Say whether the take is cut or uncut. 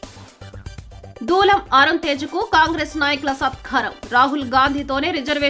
uncut